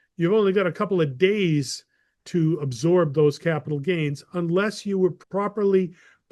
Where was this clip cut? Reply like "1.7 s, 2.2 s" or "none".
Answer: 5.2 s